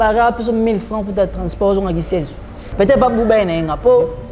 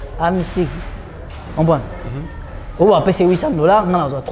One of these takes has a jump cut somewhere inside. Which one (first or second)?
first